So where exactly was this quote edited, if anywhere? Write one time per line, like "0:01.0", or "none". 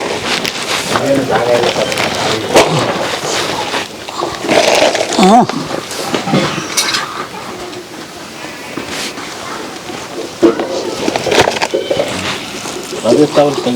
0:09.2